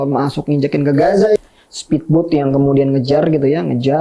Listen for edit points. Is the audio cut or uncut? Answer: cut